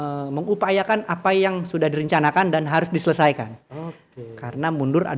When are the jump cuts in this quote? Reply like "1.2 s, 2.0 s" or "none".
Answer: none